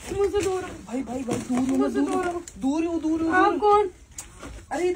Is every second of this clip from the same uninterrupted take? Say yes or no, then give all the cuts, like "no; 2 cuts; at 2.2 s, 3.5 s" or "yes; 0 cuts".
yes; 0 cuts